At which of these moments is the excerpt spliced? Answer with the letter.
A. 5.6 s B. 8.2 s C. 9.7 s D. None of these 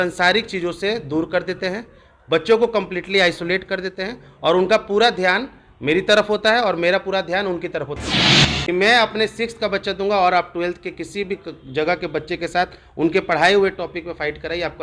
B